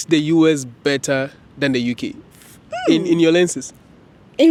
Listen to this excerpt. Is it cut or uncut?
uncut